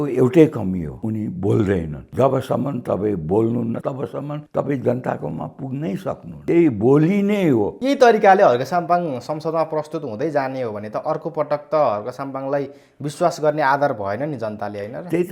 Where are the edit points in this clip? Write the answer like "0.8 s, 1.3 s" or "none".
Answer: 0.9 s, 2.0 s, 3.8 s, 6.3 s, 7.7 s